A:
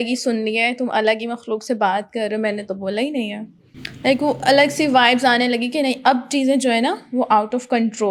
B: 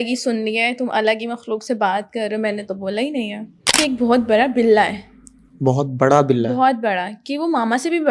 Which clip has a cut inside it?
B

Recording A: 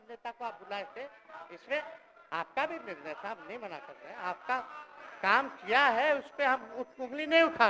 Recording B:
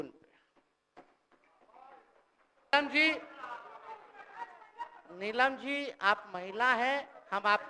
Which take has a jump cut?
B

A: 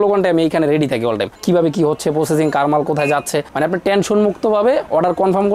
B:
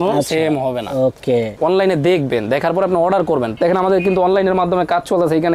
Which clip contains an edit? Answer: B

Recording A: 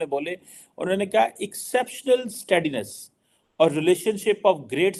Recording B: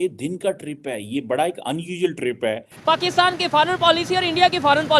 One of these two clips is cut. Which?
B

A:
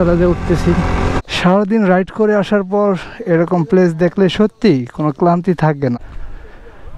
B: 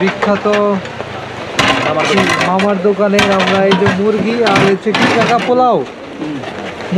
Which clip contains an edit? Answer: A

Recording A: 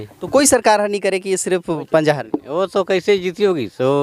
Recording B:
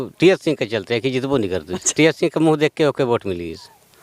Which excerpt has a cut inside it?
B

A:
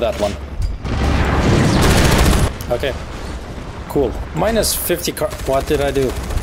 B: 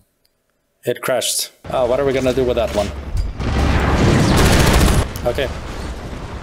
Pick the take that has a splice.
B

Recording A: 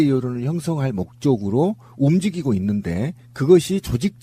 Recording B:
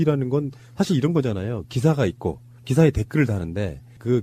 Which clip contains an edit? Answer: B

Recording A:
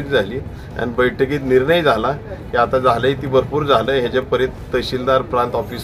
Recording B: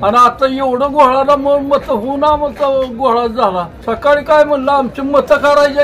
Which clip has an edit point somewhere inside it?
B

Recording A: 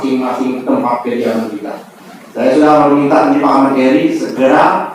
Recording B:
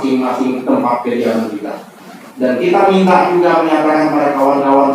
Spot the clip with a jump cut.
B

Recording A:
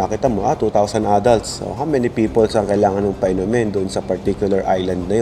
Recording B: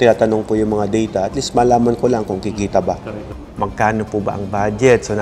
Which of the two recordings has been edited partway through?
B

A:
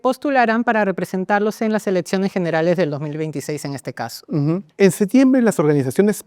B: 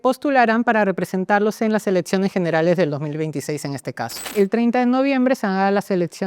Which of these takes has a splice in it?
B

